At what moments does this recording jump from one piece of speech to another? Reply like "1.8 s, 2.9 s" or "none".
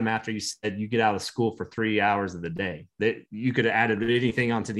none